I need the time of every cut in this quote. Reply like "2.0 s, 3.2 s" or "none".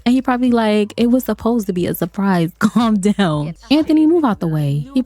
3.5 s